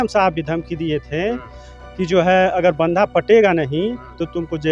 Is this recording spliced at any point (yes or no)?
no